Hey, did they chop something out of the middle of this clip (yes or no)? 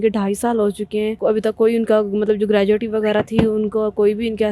yes